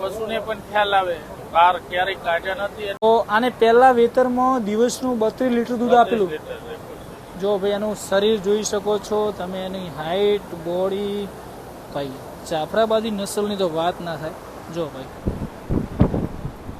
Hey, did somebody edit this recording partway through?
yes; 1 cut; at 3.0 s

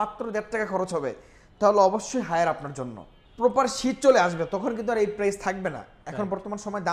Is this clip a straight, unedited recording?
no; 1 cut; at 3.2 s

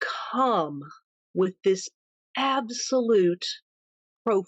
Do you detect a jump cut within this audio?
no; 0 cuts

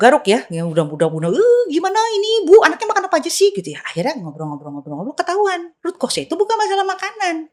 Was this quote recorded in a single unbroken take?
yes; 0 cuts

